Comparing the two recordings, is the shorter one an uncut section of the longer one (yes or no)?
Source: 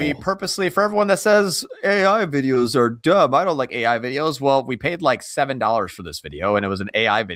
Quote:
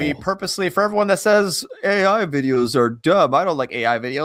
yes